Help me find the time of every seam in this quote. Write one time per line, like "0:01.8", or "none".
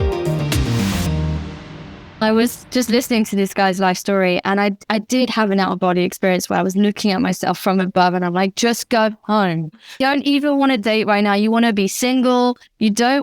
0:02.2
0:10.0